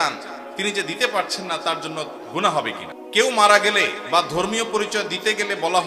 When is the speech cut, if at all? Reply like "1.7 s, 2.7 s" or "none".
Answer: 2.9 s